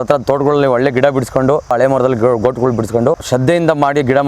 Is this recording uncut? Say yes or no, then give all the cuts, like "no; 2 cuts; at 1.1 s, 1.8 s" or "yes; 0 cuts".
no; 2 cuts; at 1.7 s, 3.2 s